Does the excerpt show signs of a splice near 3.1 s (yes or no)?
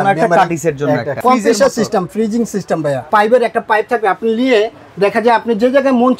yes